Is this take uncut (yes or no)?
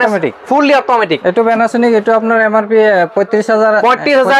yes